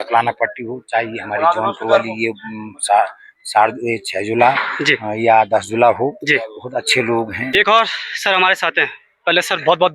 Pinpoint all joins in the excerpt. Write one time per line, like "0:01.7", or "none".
0:07.5